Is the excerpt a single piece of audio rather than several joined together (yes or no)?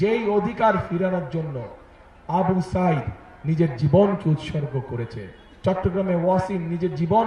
yes